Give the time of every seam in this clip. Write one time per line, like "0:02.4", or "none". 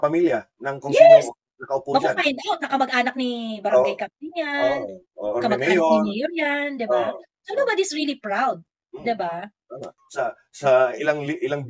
0:10.0